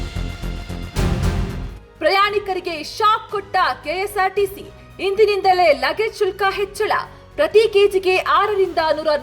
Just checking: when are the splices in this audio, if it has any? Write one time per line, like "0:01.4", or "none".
0:01.7